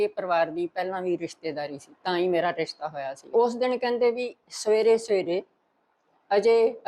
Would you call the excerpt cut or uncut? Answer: cut